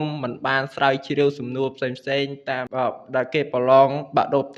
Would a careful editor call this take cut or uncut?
cut